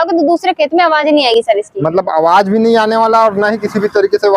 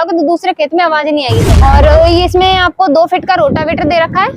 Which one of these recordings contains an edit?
second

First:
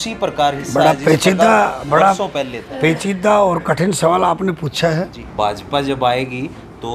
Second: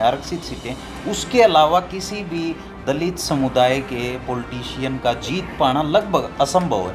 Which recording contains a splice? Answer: first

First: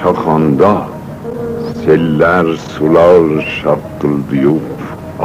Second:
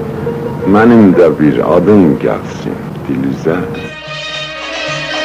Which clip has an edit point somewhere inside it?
second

